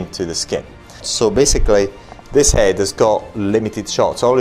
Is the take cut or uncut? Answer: cut